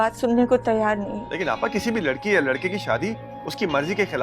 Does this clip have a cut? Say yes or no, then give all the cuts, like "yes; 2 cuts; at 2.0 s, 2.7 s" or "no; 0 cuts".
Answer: yes; 1 cut; at 1.2 s